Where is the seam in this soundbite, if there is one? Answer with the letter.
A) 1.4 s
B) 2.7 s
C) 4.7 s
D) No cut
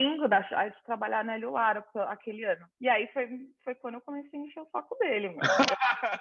B